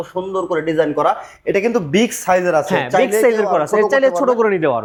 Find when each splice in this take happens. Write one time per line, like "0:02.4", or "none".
none